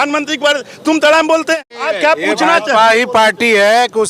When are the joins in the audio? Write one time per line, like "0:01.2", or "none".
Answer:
0:01.7